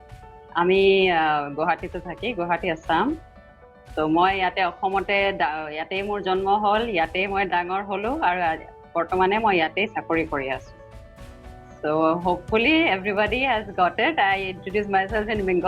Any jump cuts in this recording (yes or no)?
no